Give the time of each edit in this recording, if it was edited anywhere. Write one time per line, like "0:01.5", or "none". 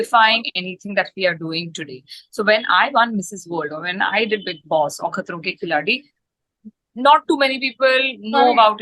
none